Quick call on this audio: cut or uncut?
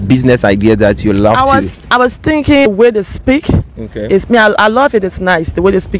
cut